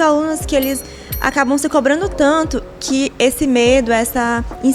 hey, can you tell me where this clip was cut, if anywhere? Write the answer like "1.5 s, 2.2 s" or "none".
none